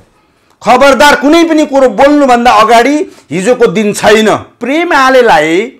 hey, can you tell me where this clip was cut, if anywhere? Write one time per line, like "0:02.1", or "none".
0:04.6